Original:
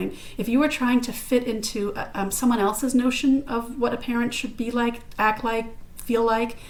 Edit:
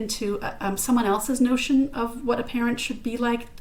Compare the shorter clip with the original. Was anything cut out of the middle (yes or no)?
no